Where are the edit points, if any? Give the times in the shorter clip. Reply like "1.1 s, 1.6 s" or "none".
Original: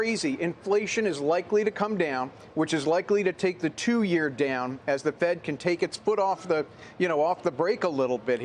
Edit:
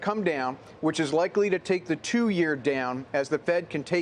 none